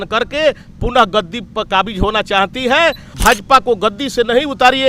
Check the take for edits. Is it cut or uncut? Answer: cut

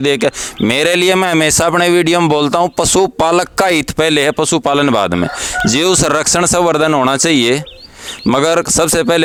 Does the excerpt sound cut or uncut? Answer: uncut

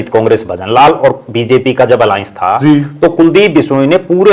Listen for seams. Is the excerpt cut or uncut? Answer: uncut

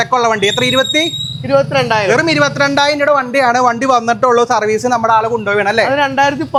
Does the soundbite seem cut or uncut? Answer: uncut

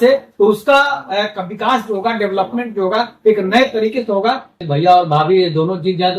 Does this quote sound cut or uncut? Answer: cut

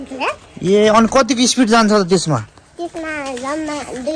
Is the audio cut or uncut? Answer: uncut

